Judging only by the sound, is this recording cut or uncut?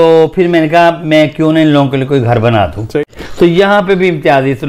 cut